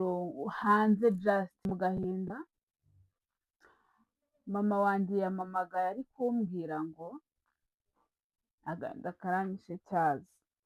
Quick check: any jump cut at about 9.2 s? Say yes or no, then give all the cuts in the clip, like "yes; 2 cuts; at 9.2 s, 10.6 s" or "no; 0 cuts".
no; 1 cut; at 1.7 s